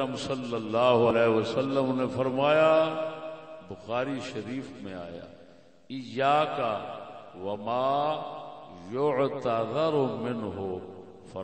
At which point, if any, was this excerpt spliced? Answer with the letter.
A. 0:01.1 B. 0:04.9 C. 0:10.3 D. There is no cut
A